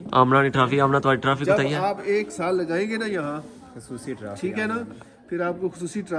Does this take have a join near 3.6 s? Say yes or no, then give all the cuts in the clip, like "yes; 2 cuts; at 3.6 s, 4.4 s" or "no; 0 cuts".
no; 0 cuts